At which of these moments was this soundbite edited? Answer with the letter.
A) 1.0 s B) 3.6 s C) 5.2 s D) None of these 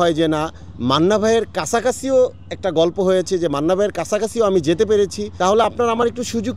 C